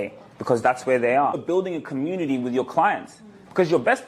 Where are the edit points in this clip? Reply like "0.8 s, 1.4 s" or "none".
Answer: 1.4 s